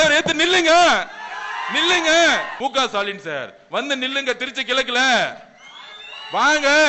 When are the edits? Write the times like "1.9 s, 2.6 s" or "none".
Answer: 2.5 s